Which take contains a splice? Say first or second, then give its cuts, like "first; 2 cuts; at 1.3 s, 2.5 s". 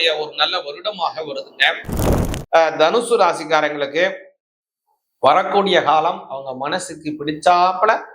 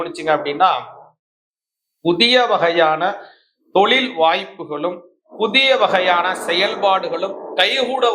first; 1 cut; at 2.0 s